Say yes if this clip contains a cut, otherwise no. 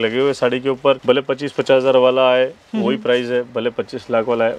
yes